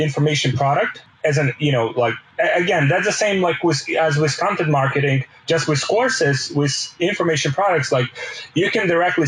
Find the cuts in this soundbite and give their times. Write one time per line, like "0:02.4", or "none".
0:01.0
0:02.2